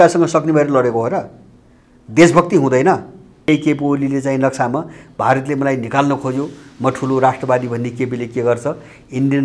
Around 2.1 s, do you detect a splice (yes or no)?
no